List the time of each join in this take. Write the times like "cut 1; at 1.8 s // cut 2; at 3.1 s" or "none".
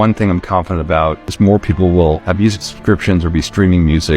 cut 1; at 1.2 s